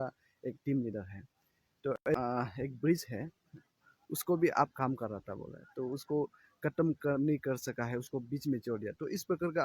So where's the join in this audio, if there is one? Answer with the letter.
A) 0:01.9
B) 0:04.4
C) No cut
A